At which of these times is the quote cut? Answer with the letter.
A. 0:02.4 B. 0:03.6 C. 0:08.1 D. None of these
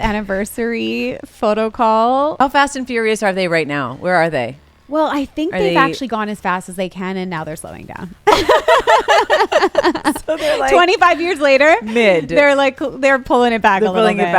A